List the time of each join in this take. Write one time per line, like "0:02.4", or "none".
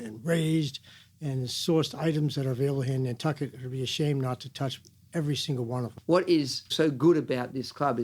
0:05.9
0:06.7